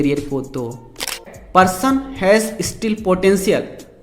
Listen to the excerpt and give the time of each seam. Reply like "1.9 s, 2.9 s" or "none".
1.3 s